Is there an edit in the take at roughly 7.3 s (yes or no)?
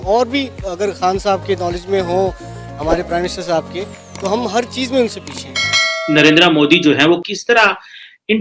yes